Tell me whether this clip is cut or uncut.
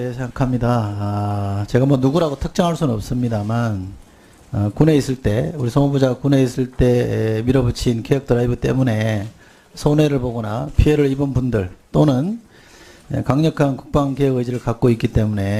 uncut